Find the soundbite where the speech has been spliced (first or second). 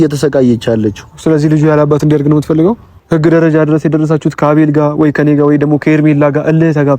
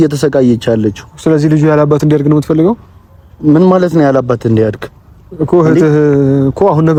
first